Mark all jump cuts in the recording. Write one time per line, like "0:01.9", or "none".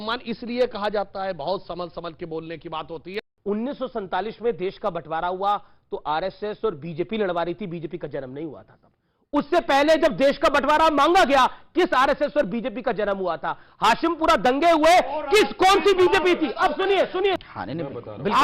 0:03.2
0:17.4